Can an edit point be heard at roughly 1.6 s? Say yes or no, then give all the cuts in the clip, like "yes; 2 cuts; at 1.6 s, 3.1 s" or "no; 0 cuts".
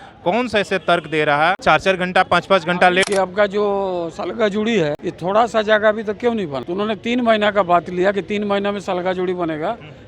yes; 4 cuts; at 1.6 s, 3.1 s, 5.1 s, 6.6 s